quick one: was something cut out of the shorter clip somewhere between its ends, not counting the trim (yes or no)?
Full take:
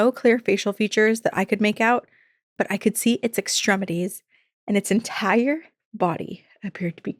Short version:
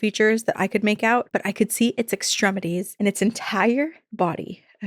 yes